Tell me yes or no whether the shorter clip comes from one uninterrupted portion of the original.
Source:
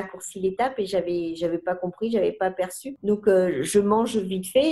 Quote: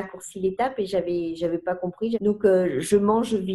no